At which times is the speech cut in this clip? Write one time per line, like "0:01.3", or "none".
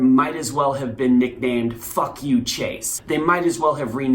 0:02.9